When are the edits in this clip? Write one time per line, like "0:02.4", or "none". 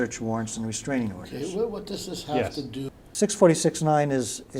0:03.0